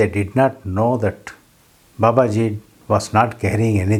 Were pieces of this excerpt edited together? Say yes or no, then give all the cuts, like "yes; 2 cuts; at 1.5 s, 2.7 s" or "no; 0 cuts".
no; 0 cuts